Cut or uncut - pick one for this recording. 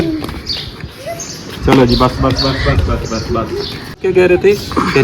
cut